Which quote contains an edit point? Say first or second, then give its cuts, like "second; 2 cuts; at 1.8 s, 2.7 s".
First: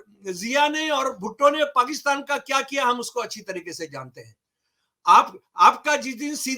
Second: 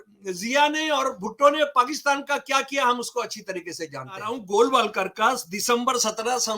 second; 1 cut; at 4.4 s